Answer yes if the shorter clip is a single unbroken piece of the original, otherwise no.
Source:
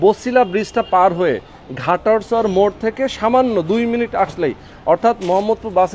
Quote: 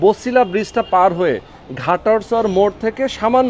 yes